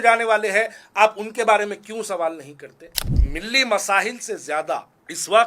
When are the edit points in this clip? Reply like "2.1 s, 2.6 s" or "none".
2.9 s